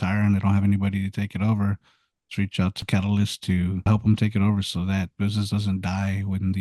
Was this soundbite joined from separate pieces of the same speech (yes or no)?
yes